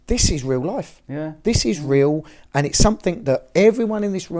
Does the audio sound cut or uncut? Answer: uncut